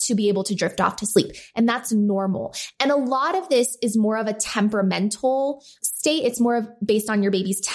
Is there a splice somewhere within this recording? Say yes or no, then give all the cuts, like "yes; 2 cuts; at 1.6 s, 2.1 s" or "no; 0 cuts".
yes; 1 cut; at 5.8 s